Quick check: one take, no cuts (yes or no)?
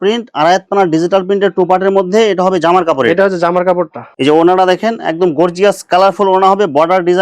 no